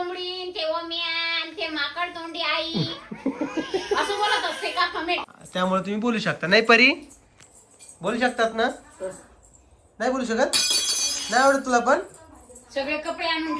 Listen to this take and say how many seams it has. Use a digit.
1